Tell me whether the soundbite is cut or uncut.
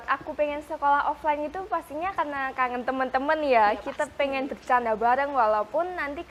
uncut